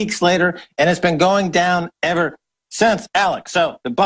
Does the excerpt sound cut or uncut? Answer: uncut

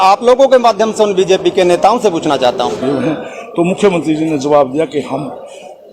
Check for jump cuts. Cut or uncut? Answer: cut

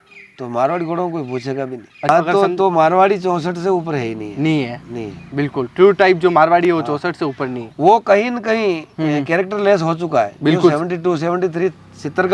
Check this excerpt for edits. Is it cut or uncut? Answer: cut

